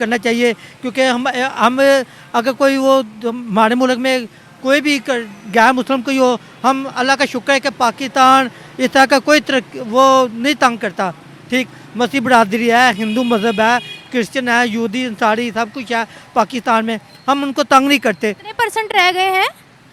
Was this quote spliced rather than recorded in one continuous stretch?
no; 0 cuts

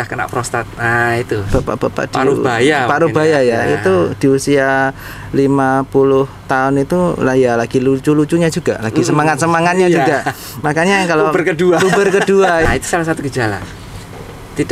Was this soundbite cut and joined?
yes; 2 cuts; at 1.4 s, 12.7 s

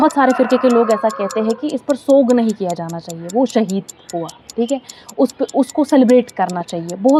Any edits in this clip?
no; 0 cuts

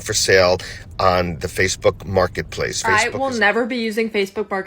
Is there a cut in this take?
yes; 1 cut; at 2.8 s

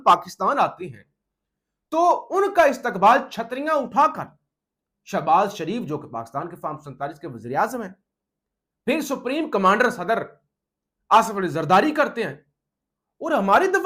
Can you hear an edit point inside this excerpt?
no; 0 cuts

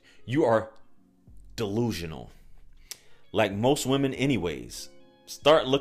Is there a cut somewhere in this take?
no; 0 cuts

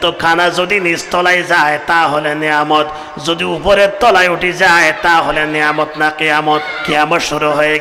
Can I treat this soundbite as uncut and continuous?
no; 1 cut; at 6.8 s

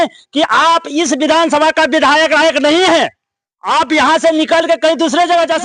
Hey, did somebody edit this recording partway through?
no; 0 cuts

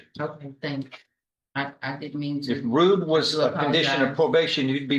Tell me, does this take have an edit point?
no; 0 cuts

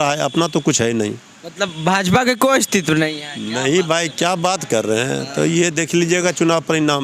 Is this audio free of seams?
yes; 0 cuts

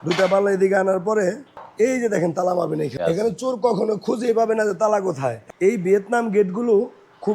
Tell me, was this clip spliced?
yes; 3 cuts; at 1.6 s, 2.9 s, 5.4 s

